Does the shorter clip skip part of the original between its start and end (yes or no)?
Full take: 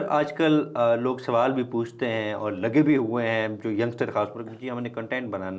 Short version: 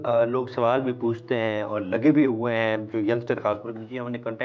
no